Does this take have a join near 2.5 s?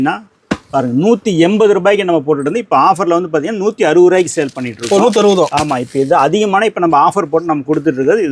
no; 0 cuts

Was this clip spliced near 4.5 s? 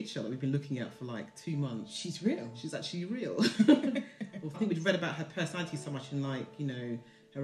yes; 1 cut; at 4.5 s

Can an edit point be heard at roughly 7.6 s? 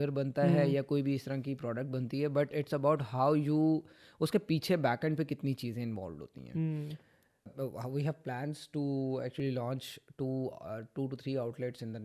yes; 1 cut; at 7.6 s

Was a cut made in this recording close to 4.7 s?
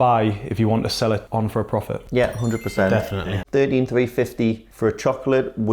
no; 2 cuts; at 1.2 s, 3.3 s

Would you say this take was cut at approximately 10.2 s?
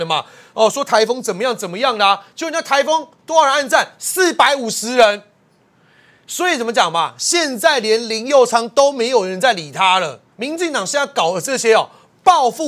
yes; 1 cut; at 10.2 s

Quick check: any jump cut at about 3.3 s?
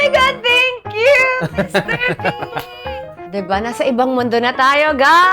yes; 1 cut; at 3.3 s

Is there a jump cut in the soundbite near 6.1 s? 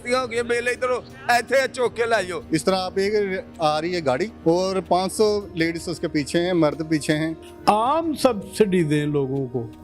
no; 2 cuts; at 2.4 s, 7.3 s

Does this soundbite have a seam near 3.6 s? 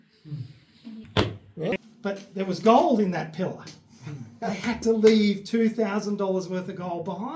no; 1 cut; at 1.8 s

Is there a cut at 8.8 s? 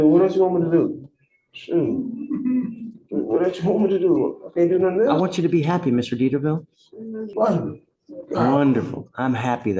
no; 1 cut; at 7.3 s

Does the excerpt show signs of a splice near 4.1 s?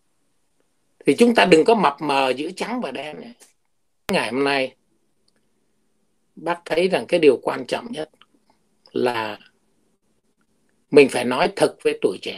yes; 1 cut; at 4.1 s

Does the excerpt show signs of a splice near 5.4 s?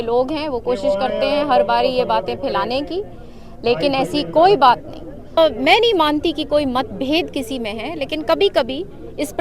yes; 1 cut; at 5.4 s

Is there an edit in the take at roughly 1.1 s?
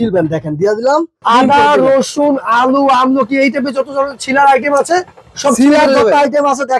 yes; 1 cut; at 1.1 s

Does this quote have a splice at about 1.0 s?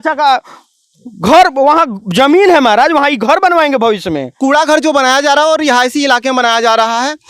no; 1 cut; at 4.4 s

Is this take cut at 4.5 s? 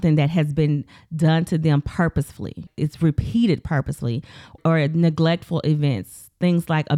yes; 2 cuts; at 2.7 s, 4.5 s

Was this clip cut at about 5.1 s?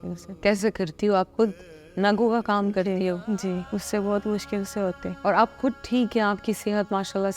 yes; 2 cuts; at 3.6 s, 5.1 s

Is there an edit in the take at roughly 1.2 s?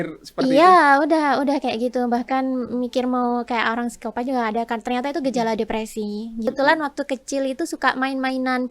no; 1 cut; at 6.5 s

